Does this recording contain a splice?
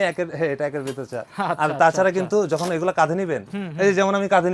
no; 0 cuts

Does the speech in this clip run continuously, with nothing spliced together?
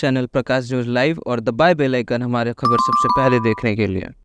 yes; 0 cuts

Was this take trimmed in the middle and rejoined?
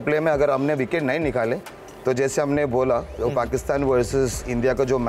no; 0 cuts

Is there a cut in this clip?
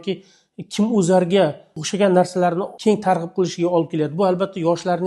no; 0 cuts

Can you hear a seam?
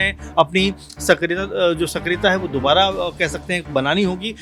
no; 0 cuts

